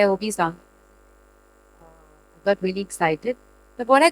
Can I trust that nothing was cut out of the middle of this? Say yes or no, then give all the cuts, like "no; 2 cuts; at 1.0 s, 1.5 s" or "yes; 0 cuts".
yes; 0 cuts